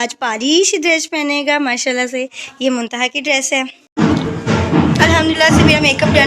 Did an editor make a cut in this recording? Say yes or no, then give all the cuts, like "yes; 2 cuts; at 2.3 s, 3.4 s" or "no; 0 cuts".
yes; 1 cut; at 3.8 s